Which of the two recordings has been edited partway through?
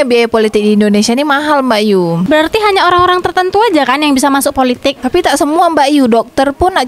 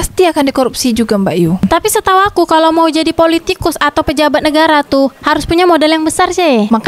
second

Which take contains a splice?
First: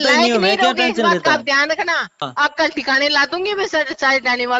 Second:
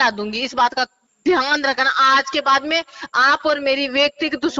first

